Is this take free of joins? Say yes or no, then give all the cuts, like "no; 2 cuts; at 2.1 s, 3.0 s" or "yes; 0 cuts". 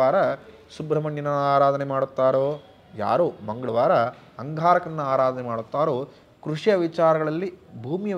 yes; 0 cuts